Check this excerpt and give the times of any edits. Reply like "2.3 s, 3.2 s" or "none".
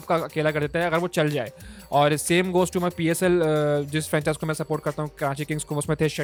none